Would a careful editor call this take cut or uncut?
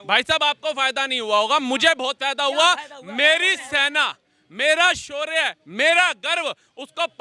uncut